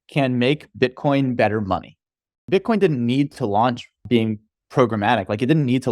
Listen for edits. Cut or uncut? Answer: cut